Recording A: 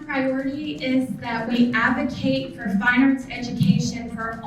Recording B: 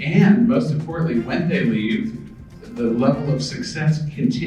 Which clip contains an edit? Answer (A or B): A